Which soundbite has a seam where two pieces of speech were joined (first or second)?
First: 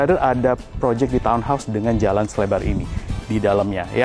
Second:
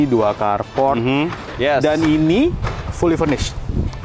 second